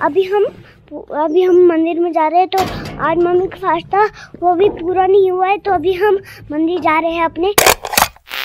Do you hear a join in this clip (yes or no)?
yes